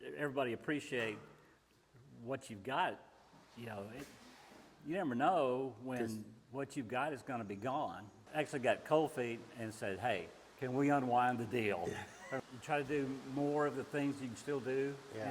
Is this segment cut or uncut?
cut